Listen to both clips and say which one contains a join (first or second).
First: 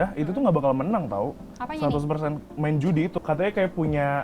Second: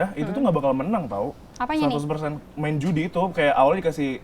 first